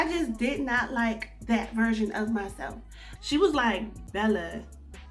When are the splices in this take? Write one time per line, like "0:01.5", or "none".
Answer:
0:03.1